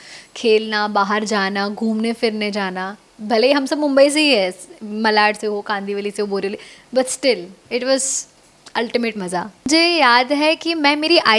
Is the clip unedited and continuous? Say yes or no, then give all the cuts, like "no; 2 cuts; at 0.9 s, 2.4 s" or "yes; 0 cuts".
no; 1 cut; at 9.7 s